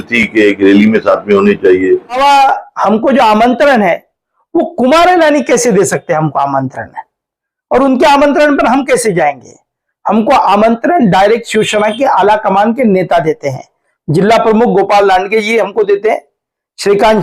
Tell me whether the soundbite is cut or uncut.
cut